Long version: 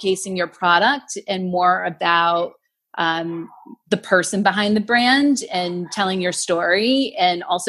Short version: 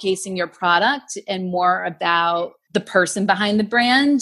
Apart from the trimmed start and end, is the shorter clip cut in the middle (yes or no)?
yes